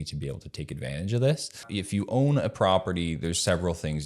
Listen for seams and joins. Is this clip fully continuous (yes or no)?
no